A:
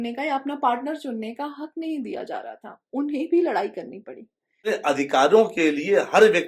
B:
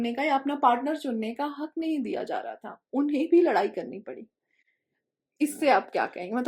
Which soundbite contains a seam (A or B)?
A